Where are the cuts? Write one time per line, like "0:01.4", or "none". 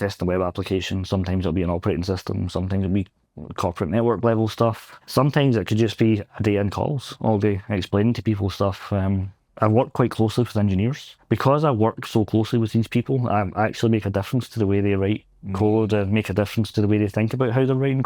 0:04.9
0:11.1